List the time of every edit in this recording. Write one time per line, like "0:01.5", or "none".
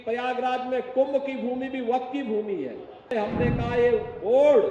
0:03.1